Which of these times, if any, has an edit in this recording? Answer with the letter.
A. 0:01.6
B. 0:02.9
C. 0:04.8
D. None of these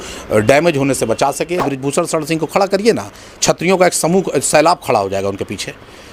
A